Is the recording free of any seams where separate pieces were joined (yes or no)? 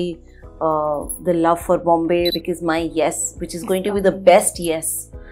no